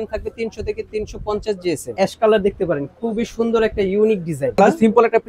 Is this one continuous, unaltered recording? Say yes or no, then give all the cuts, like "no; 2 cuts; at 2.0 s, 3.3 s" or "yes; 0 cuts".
no; 2 cuts; at 1.9 s, 4.6 s